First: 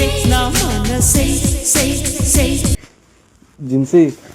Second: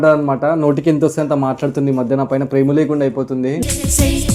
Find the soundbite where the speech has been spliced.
first; 1 cut; at 2.7 s

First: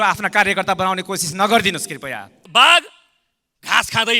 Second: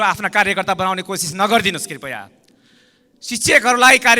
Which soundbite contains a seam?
first; 1 cut; at 2.4 s

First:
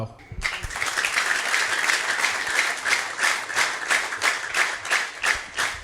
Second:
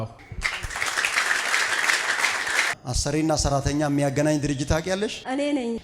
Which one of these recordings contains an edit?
second; 1 cut; at 2.8 s

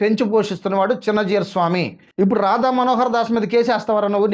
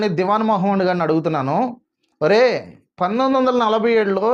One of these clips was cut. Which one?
first; 1 cut; at 2.0 s

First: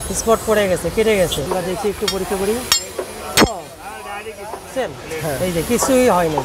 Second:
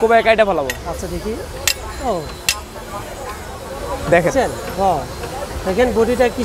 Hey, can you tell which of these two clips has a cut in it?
first; 1 cut; at 1.5 s

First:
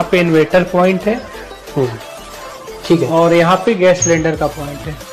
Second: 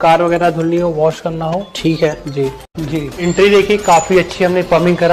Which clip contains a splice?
second; 1 cut; at 2.7 s

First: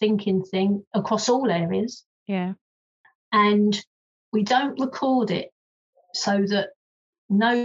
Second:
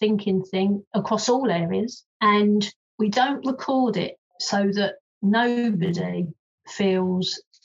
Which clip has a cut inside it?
second; 3 cuts; at 2.0 s, 2.8 s, 4.7 s

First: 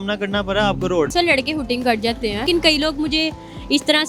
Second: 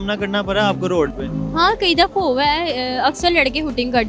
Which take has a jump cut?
first; 2 cuts; at 1.1 s, 2.4 s

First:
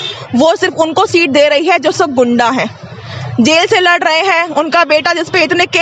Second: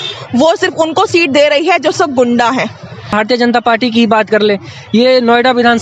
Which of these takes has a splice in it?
second; 1 cut; at 3.1 s

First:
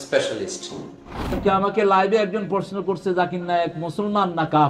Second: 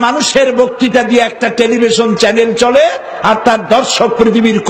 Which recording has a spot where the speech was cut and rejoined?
first; 1 cut; at 1.4 s

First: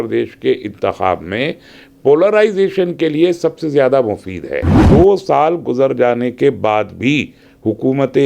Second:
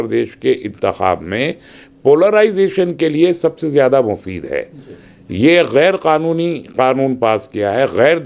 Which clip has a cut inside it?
first; 1 cut; at 4.8 s

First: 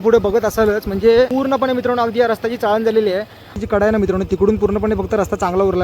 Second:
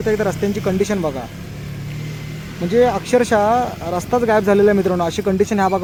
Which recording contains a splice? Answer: first; 2 cuts; at 1.3 s, 3.6 s

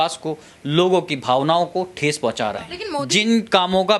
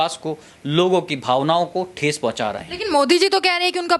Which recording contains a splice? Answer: first; 1 cut; at 2.8 s

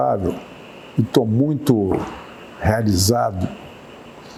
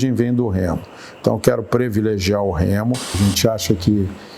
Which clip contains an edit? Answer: second; 1 cut; at 3.1 s

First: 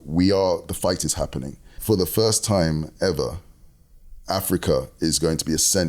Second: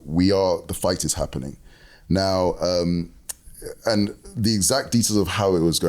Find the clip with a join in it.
first; 1 cut; at 1.8 s

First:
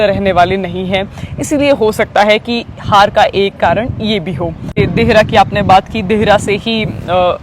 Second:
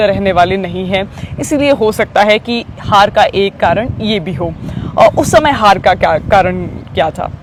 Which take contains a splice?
first; 1 cut; at 4.8 s

